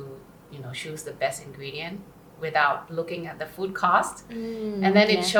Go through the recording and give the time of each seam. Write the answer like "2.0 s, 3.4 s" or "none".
none